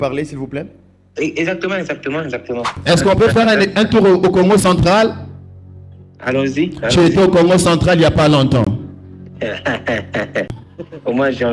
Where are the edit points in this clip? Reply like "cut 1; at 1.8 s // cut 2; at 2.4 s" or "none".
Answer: cut 1; at 2.7 s // cut 2; at 10.6 s